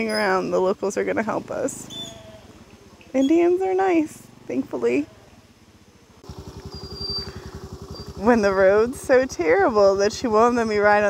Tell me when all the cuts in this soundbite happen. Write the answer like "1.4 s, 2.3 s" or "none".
6.2 s